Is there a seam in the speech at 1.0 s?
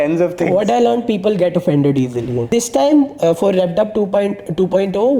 no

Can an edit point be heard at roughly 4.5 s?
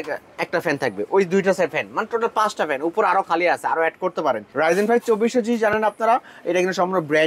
yes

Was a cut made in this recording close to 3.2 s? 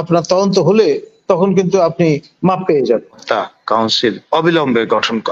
yes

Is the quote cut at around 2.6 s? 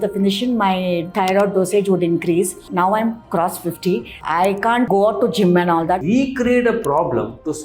yes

